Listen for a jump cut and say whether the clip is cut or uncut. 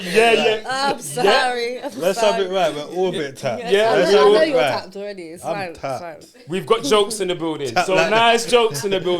uncut